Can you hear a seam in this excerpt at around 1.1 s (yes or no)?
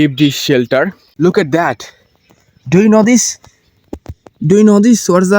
yes